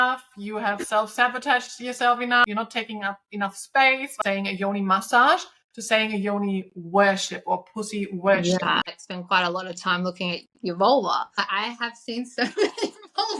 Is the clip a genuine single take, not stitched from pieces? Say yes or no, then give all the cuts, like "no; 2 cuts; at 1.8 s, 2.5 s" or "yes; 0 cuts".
no; 4 cuts; at 2.4 s, 4.1 s, 9.0 s, 11.5 s